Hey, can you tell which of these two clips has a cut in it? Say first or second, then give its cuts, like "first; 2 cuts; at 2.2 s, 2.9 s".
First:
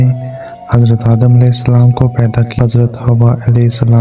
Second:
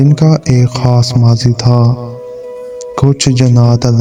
first; 1 cut; at 2.5 s